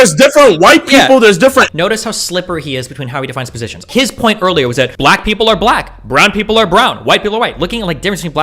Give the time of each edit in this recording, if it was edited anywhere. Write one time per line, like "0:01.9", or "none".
0:01.7
0:03.9
0:04.9